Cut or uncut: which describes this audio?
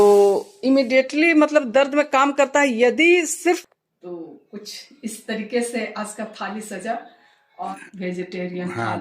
cut